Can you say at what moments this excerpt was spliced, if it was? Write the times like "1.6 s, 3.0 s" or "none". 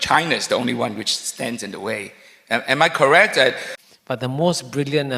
3.7 s